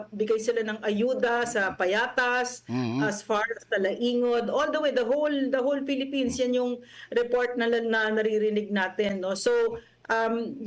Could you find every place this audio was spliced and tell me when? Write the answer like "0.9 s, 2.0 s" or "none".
none

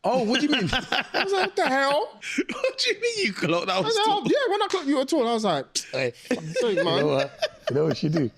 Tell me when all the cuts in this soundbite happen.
2.2 s

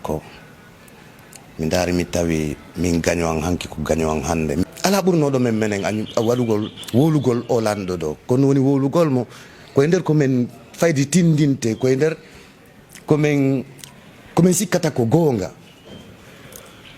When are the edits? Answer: 4.6 s

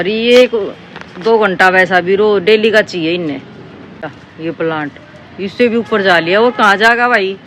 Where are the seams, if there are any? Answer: 4.2 s

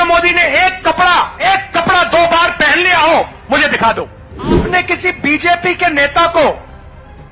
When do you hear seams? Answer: 1.3 s, 4.6 s

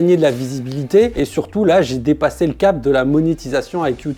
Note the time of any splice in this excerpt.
1.1 s

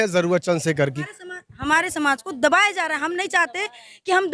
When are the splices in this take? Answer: 1.0 s

